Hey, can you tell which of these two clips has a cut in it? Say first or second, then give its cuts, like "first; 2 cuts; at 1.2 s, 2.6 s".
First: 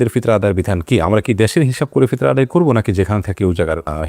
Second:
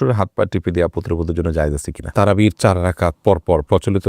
second; 1 cut; at 2.0 s